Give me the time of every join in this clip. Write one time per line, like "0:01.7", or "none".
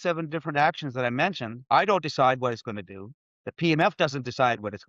0:01.5